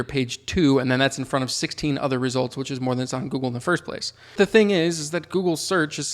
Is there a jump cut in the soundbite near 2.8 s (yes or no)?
no